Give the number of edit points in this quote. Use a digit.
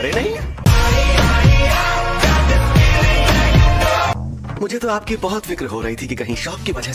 0